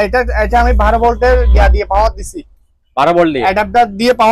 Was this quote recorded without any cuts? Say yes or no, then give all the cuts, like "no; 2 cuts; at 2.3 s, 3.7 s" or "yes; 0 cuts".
yes; 0 cuts